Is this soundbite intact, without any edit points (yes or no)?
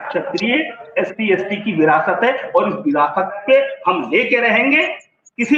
yes